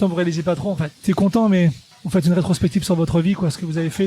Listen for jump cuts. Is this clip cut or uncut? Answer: cut